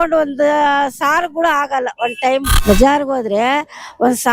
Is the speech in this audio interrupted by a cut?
yes; 1 cut; at 2.5 s

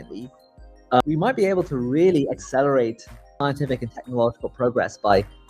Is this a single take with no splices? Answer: yes; 0 cuts

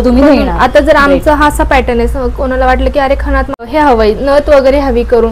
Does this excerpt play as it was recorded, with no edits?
no; 1 cut; at 3.7 s

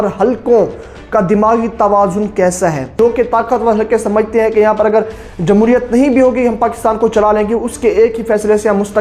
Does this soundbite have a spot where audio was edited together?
yes; 1 cut; at 2.9 s

